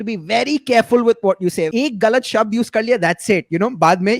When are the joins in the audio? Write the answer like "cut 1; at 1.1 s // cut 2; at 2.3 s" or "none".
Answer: cut 1; at 1.7 s